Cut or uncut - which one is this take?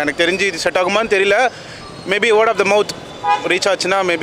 uncut